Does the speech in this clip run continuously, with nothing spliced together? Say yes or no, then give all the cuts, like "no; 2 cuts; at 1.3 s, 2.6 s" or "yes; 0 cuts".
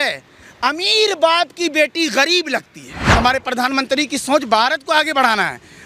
no; 1 cut; at 3.0 s